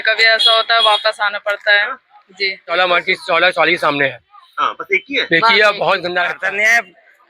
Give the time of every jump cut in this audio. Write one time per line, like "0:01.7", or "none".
0:02.7
0:06.4